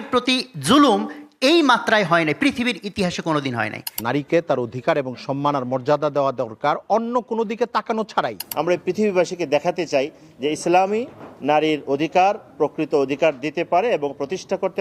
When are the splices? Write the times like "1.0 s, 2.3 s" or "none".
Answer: 3.8 s, 8.4 s